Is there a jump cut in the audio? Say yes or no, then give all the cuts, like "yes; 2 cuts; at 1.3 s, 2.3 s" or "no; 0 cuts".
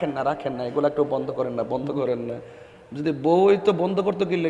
no; 0 cuts